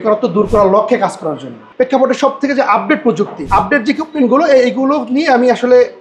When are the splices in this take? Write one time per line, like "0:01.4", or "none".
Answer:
0:01.6
0:03.4